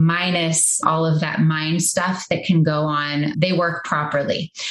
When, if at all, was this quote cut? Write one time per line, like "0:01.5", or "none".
0:00.8
0:03.4